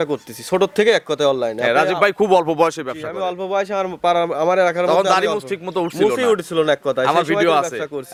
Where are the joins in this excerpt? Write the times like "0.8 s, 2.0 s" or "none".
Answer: none